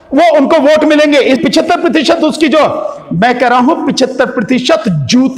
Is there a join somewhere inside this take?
yes; 1 cut; at 1.4 s

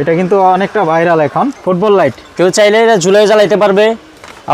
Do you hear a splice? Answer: yes; 1 cut; at 1.6 s

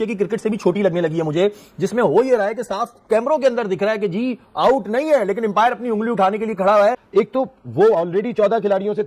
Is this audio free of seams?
no; 1 cut; at 7.0 s

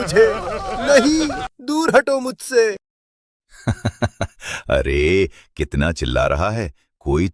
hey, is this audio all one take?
yes; 0 cuts

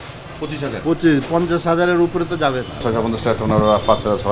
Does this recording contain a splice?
yes; 1 cut; at 2.8 s

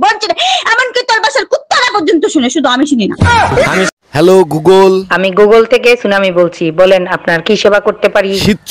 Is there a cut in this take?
yes; 1 cut; at 4.0 s

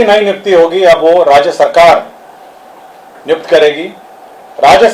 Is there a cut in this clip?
no; 0 cuts

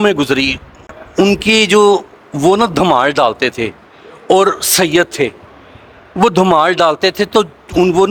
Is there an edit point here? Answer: no; 0 cuts

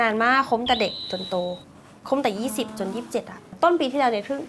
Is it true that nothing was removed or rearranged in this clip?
yes; 0 cuts

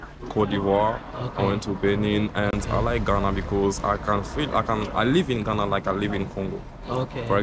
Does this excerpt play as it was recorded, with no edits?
yes; 0 cuts

